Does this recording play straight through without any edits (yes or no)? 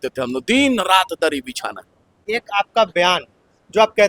no